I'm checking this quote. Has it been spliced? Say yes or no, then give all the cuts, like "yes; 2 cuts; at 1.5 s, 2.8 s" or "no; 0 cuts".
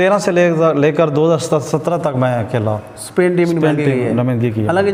no; 0 cuts